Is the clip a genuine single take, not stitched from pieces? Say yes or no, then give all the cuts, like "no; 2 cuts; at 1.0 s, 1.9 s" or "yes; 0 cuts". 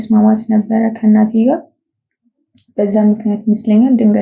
yes; 0 cuts